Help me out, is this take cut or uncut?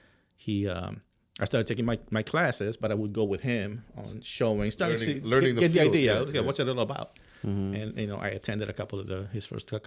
uncut